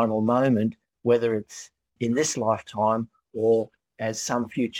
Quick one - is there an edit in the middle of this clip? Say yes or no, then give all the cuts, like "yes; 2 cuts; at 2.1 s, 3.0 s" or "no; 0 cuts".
yes; 2 cuts; at 2.0 s, 3.9 s